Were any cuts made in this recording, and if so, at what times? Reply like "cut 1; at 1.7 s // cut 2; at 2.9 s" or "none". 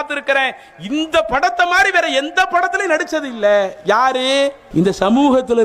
cut 1; at 4.6 s